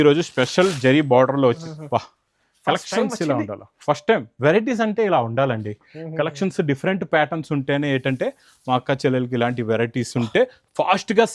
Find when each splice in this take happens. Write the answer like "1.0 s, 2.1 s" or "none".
1.6 s